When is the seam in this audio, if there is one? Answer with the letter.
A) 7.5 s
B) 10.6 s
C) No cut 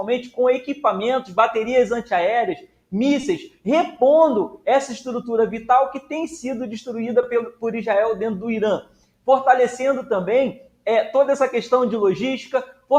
C